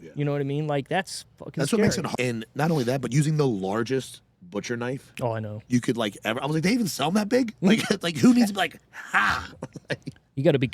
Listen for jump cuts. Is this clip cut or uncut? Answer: cut